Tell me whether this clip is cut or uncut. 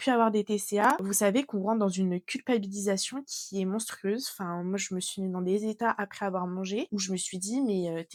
uncut